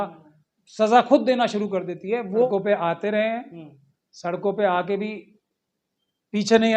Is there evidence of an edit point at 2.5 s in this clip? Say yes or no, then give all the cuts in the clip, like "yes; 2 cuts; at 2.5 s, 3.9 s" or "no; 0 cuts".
yes; 1 cut; at 2.5 s